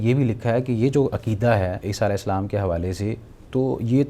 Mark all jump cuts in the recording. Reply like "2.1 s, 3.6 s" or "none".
1.8 s